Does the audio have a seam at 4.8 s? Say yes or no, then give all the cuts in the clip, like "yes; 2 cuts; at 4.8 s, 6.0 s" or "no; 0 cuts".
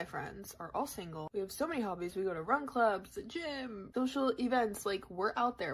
yes; 1 cut; at 4.8 s